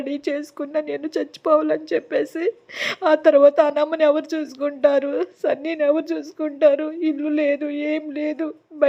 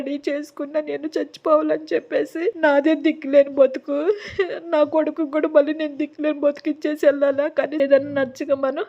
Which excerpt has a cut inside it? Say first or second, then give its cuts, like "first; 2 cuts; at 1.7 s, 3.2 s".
second; 2 cuts; at 2.6 s, 7.8 s